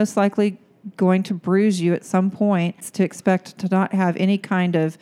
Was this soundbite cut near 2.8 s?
yes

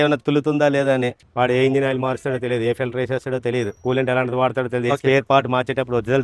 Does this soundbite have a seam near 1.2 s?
yes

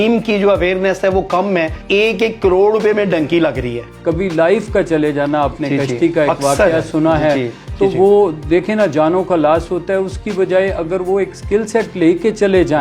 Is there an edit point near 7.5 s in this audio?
no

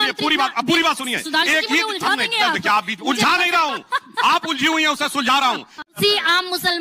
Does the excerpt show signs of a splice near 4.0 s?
no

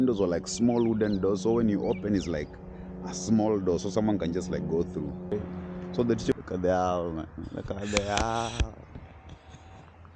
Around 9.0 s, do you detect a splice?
no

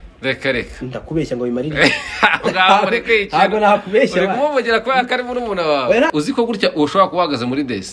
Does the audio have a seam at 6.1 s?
yes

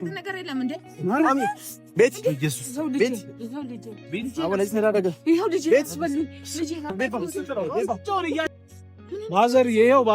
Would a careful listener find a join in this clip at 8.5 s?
yes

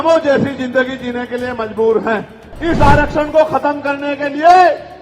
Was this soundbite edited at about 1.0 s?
no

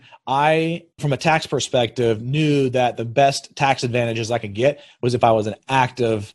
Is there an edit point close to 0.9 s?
yes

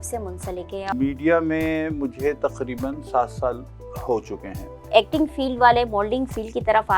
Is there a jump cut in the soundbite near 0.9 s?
yes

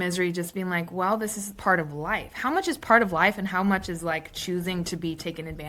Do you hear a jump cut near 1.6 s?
yes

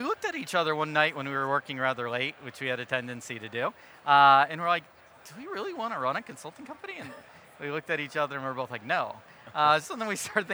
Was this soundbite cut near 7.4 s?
no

